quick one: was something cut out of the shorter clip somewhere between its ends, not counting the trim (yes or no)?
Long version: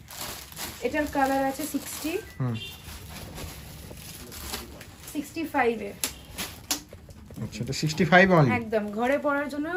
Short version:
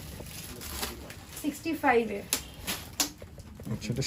no